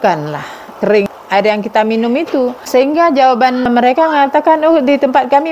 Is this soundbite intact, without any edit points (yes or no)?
no